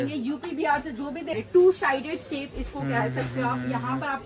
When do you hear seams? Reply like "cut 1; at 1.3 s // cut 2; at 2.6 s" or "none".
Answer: cut 1; at 1.4 s